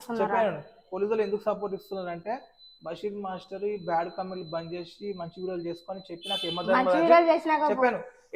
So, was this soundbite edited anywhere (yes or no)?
no